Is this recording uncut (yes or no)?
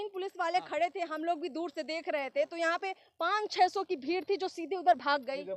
yes